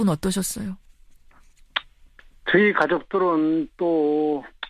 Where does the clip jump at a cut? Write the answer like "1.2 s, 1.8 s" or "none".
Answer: none